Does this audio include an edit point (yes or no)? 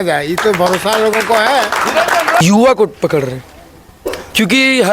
yes